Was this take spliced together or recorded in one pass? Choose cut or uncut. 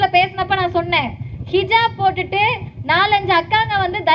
uncut